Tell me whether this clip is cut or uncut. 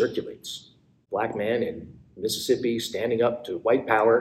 cut